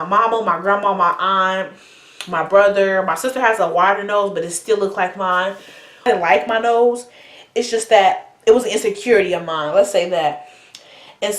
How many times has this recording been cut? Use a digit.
1